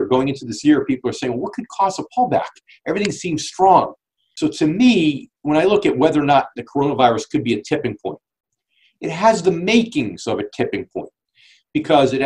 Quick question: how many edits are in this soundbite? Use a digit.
1